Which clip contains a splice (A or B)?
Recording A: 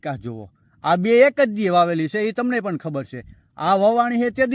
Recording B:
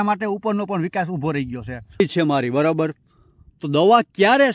B